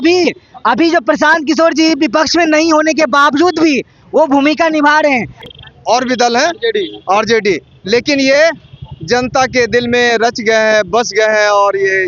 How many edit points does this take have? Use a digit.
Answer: 1